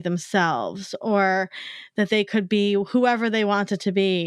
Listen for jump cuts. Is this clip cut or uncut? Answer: uncut